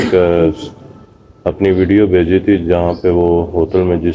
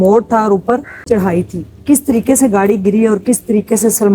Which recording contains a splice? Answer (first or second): second